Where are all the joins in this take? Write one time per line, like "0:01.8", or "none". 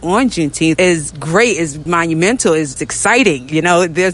0:00.8
0:01.8
0:02.8